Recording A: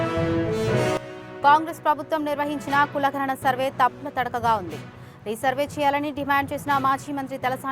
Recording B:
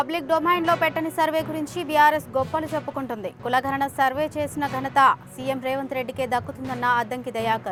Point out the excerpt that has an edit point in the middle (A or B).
A